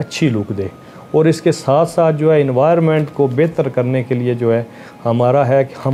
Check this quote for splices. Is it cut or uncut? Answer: uncut